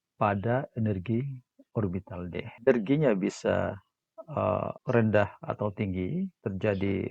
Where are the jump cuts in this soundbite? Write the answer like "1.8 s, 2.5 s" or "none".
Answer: 2.5 s, 4.8 s, 6.4 s